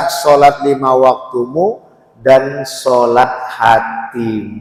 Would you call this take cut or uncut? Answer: uncut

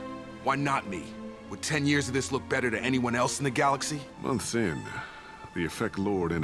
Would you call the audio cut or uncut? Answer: cut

